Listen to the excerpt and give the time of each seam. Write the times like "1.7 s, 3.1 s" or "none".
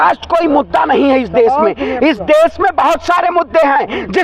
none